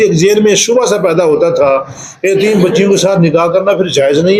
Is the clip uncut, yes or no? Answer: yes